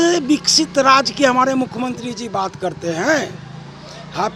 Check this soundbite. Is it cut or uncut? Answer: uncut